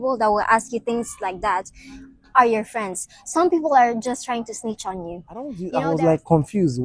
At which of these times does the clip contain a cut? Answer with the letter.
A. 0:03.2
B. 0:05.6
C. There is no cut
B